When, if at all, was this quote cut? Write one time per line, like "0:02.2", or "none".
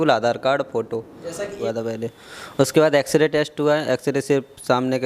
0:01.5